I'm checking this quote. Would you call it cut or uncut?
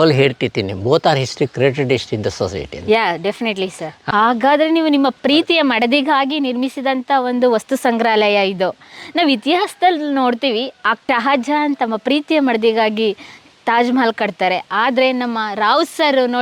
cut